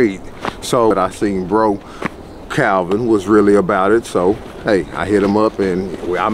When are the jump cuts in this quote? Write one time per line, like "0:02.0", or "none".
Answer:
0:00.9